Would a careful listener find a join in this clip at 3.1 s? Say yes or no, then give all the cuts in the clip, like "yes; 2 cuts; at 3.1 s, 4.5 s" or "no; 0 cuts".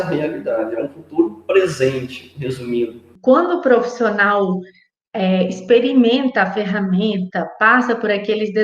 yes; 1 cut; at 3.1 s